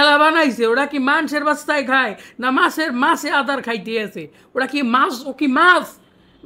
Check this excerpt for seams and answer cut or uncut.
cut